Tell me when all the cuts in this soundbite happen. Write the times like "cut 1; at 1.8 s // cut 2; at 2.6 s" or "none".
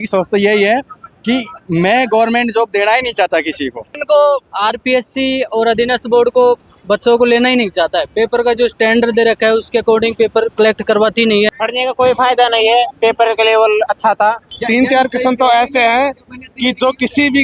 cut 1; at 4.0 s // cut 2; at 11.5 s // cut 3; at 14.5 s